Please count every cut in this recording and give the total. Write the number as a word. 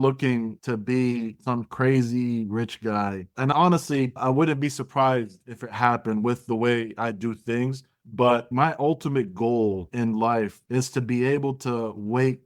zero